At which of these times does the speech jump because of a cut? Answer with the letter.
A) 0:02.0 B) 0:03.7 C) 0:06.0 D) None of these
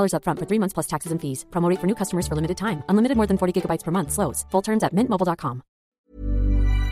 C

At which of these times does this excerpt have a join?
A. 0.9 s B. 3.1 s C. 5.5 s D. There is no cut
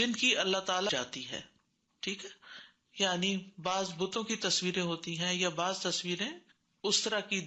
A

